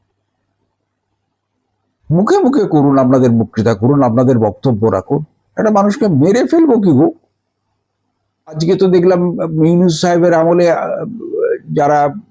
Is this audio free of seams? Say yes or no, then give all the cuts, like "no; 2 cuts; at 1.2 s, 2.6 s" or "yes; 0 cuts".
no; 1 cut; at 8.6 s